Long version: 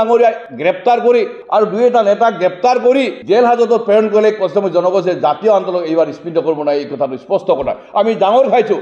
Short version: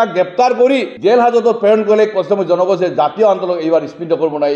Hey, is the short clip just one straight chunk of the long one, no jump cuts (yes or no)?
yes